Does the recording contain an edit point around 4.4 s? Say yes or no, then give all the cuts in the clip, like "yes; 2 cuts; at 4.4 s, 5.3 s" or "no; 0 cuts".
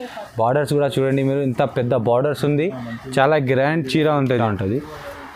yes; 1 cut; at 4.4 s